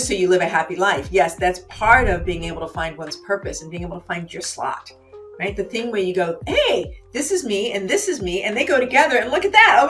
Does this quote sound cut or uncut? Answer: uncut